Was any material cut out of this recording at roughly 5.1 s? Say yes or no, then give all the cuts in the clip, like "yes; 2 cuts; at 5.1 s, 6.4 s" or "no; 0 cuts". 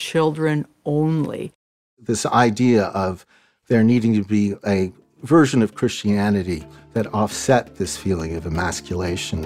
no; 1 cut; at 1.9 s